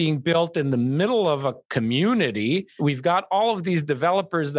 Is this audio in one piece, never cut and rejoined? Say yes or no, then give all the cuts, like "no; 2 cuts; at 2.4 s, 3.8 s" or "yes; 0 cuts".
no; 1 cut; at 2.7 s